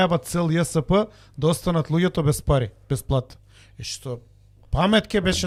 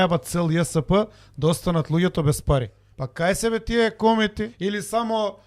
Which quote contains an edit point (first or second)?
second